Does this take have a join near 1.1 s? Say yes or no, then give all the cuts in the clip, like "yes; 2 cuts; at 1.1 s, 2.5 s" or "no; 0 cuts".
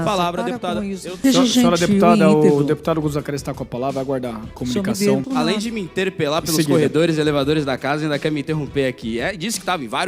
yes; 2 cuts; at 1.1 s, 5.2 s